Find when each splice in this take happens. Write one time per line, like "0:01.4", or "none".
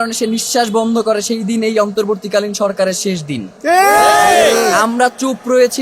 none